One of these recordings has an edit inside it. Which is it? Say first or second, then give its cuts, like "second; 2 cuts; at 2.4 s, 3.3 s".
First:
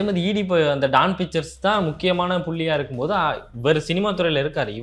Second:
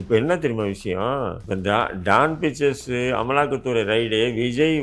second; 1 cut; at 1.4 s